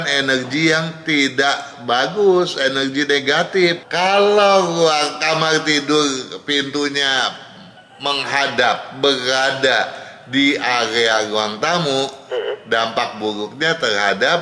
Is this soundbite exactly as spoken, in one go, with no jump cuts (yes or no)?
no